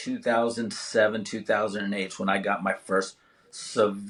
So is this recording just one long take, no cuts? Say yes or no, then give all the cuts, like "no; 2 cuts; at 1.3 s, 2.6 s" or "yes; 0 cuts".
yes; 0 cuts